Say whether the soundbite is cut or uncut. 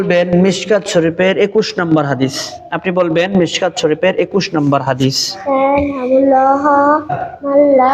uncut